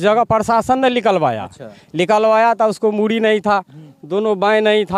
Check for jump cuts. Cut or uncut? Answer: uncut